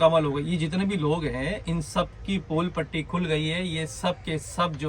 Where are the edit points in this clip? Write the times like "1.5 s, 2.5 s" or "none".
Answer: none